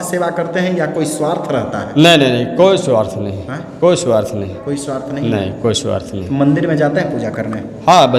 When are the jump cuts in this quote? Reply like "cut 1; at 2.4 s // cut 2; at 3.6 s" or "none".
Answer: none